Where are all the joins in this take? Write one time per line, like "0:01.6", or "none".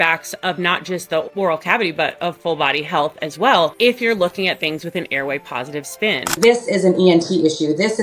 0:06.4